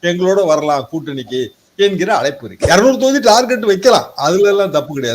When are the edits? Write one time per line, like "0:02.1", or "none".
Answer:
0:02.5